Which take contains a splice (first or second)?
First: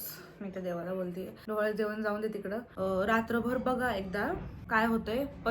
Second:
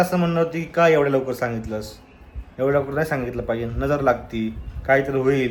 first